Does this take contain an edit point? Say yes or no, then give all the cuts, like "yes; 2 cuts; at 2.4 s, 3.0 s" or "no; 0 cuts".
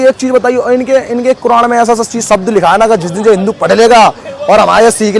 no; 0 cuts